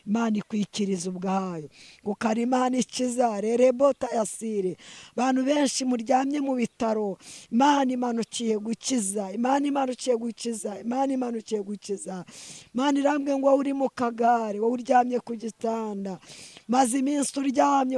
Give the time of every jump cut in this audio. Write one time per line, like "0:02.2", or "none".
none

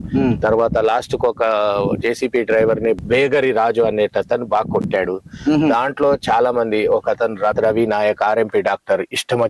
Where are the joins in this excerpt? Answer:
0:03.0
0:07.5

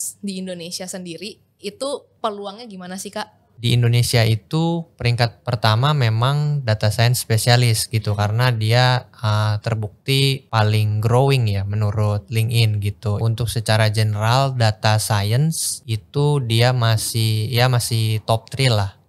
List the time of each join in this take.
0:03.6
0:13.2

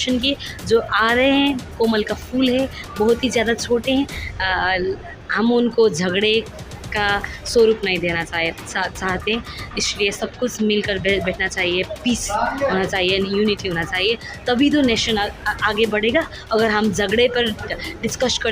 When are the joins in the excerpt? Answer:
none

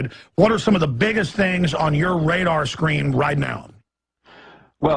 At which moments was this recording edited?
0:01.8

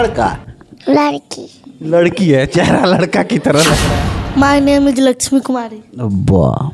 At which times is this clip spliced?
0:03.9

